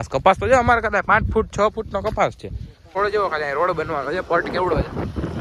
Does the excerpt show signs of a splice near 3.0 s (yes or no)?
yes